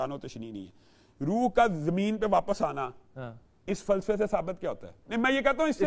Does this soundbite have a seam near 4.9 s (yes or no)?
yes